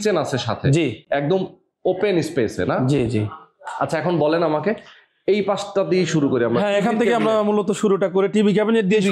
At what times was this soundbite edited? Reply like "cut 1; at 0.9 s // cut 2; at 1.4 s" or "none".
none